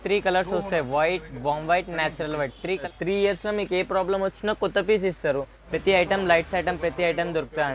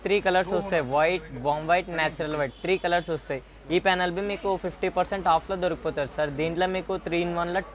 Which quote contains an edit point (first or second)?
first